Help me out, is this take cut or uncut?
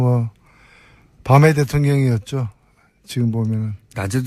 cut